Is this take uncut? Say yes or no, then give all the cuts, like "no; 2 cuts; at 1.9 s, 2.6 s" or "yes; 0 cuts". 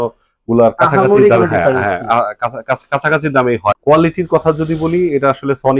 no; 1 cut; at 3.7 s